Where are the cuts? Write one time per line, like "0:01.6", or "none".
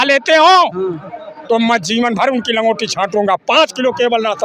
none